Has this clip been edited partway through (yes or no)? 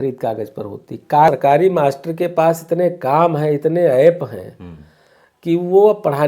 yes